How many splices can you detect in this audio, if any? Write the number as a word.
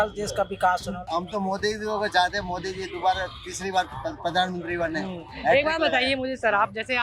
one